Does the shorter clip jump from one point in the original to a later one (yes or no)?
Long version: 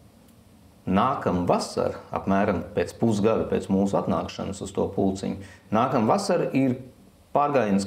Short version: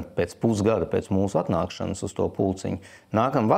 no